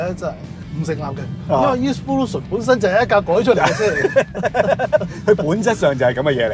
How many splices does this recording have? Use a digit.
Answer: 0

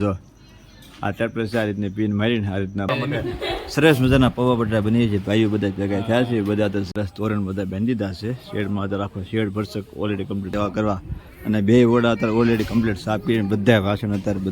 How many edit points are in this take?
3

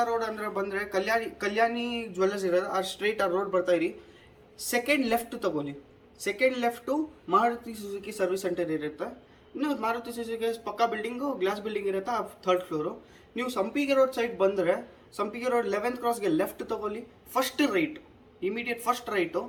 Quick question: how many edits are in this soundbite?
0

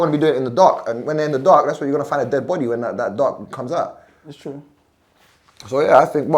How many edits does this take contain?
1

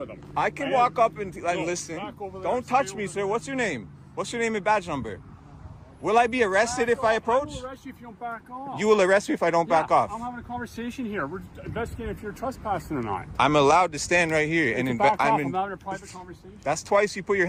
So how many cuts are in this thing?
0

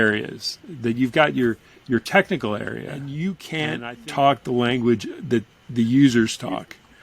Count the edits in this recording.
1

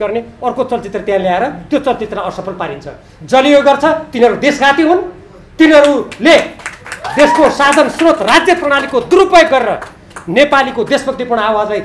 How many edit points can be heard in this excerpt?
0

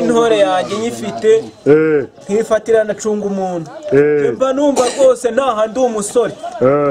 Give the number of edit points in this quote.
0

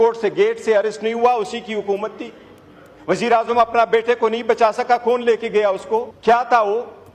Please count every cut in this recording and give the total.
1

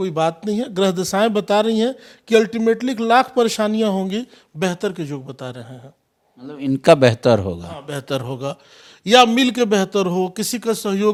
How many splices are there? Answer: 0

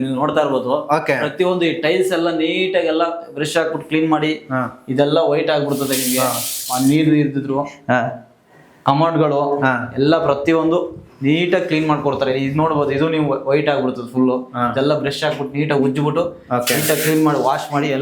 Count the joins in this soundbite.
0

